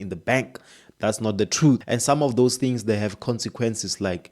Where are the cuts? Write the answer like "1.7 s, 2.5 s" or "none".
1.8 s